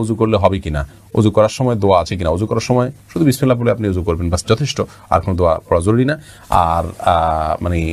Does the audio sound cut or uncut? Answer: uncut